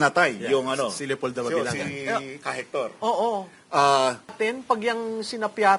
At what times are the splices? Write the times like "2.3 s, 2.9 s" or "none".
4.3 s